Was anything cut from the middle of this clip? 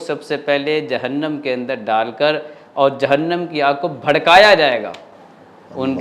no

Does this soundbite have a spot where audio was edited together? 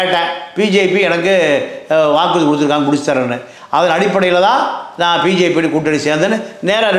no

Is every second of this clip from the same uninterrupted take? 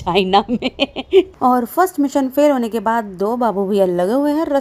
no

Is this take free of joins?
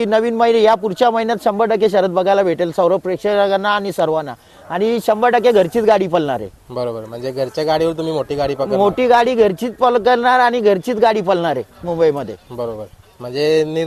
yes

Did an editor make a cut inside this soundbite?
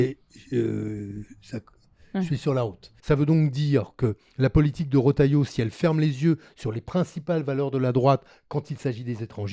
yes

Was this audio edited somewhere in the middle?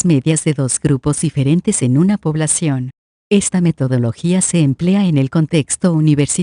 yes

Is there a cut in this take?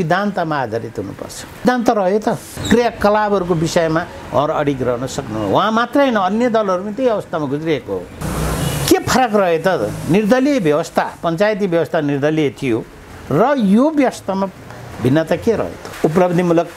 yes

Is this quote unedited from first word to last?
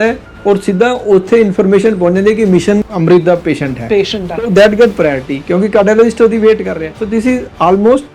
no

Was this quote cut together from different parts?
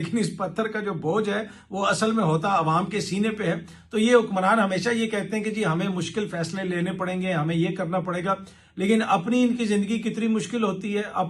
no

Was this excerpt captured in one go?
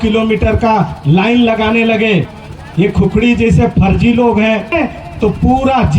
no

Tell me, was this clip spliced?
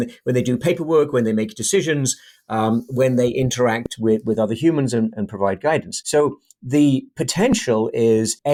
no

